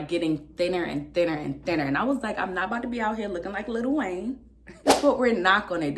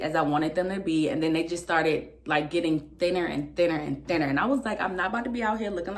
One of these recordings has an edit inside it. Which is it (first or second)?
first